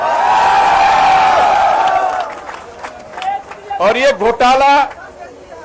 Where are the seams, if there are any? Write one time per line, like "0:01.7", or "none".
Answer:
none